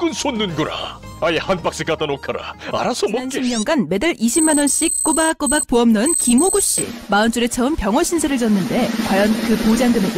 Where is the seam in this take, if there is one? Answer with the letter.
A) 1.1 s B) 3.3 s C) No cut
B